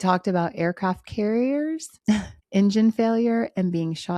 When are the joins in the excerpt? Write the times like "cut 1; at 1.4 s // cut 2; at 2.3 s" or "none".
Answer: cut 1; at 2.2 s